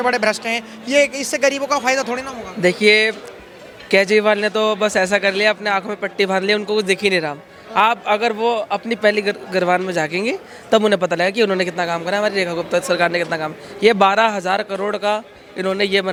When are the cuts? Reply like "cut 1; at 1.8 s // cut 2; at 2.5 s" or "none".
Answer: none